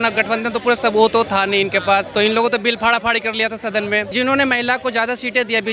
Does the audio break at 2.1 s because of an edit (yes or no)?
yes